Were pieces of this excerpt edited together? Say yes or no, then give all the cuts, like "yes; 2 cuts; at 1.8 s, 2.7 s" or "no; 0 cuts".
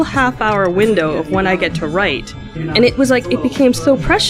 yes; 1 cut; at 2.6 s